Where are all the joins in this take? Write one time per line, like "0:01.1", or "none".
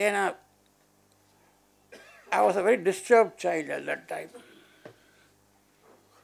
none